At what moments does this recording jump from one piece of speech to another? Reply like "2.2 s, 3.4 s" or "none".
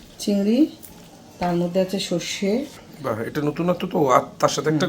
2.9 s